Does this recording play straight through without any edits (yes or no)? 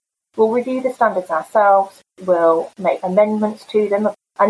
no